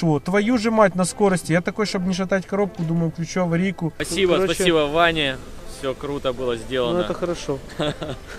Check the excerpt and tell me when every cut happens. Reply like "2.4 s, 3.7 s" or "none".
4.1 s